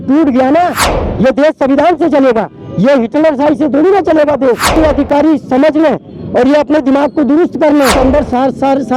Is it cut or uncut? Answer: cut